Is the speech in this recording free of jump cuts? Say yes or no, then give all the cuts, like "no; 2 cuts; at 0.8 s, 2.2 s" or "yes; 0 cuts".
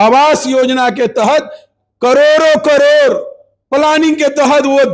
yes; 0 cuts